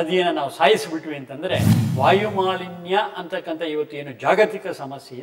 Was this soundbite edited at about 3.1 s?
no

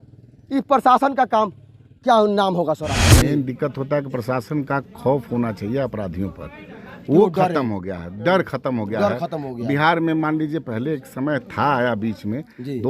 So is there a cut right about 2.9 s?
yes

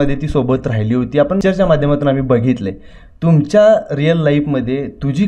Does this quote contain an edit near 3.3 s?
no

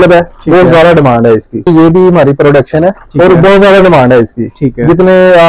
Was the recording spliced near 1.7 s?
yes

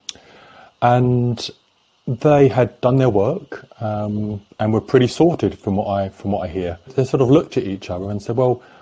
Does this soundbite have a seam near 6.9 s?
yes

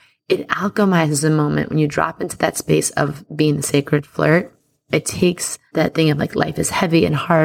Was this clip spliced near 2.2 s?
no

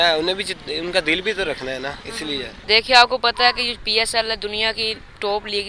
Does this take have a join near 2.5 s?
yes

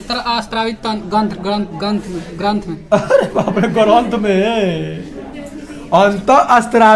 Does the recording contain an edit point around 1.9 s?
no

